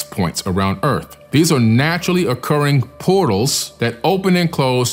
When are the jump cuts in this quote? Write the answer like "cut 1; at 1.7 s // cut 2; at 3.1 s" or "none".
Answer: cut 1; at 1.2 s // cut 2; at 3.6 s